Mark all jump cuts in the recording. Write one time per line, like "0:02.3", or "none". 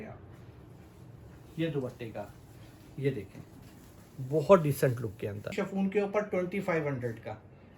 0:05.6

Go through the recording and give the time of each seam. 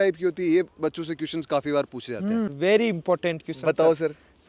0:02.5

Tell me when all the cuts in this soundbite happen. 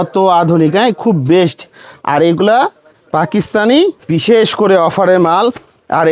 0:04.0

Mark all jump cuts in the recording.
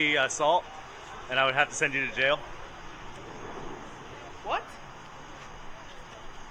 none

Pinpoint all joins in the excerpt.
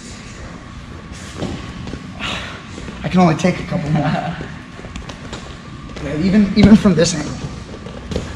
none

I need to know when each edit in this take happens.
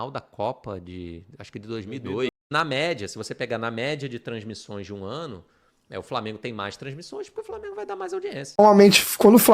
0:02.4
0:08.6

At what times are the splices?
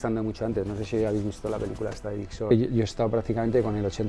0:02.5

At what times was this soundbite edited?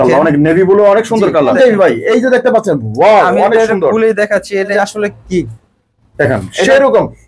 0:01.5
0:04.7

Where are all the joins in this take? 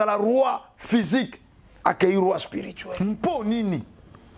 0:02.9

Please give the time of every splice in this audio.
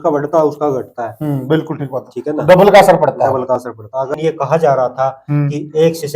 0:04.2

